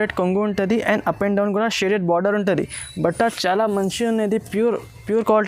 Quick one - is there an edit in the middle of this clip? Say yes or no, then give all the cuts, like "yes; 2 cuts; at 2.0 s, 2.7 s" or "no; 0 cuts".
no; 0 cuts